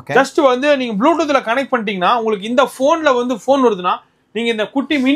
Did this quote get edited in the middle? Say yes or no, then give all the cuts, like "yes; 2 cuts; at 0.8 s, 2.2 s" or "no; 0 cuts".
no; 0 cuts